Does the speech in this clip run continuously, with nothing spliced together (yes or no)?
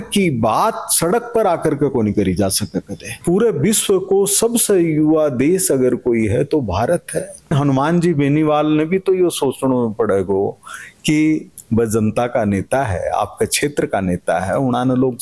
no